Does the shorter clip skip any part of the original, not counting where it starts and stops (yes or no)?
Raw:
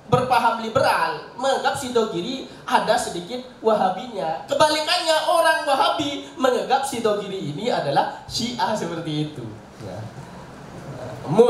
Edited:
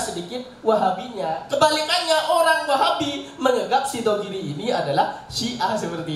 no